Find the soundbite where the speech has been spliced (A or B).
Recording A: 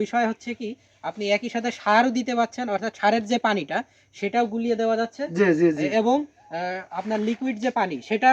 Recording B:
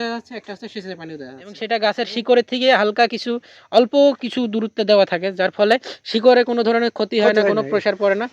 B